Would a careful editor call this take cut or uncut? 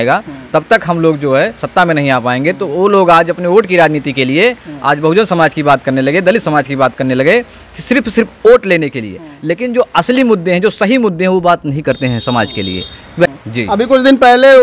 cut